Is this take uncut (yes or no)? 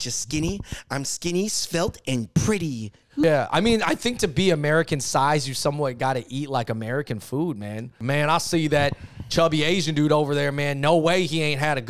no